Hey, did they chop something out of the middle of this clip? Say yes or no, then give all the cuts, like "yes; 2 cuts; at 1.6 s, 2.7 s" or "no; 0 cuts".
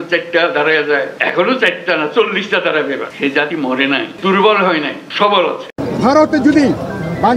yes; 5 cuts; at 1.1 s, 3.1 s, 4.1 s, 5.0 s, 5.7 s